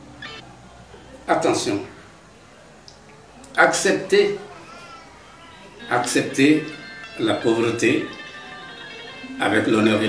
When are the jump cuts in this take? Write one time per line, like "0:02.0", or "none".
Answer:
none